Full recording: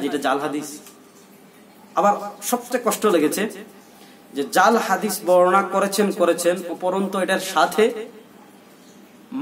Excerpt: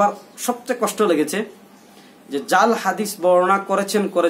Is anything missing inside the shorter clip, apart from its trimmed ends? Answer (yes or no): no